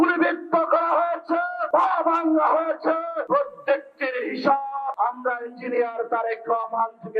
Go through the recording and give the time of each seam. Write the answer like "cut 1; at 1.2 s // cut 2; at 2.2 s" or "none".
cut 1; at 1.6 s // cut 2; at 3.2 s // cut 3; at 4.9 s